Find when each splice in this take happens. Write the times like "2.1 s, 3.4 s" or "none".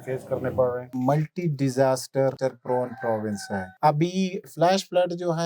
1.0 s, 2.4 s, 3.7 s, 4.5 s